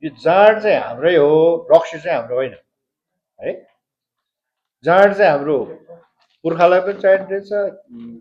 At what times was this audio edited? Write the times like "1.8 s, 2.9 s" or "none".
none